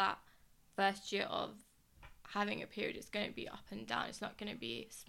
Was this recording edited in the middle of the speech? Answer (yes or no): no